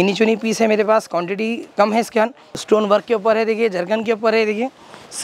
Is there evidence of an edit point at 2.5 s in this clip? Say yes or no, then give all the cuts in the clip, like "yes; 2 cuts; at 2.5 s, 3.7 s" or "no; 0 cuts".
yes; 1 cut; at 2.5 s